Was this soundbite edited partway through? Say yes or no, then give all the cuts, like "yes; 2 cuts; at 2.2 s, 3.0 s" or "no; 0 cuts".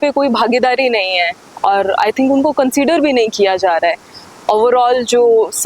no; 0 cuts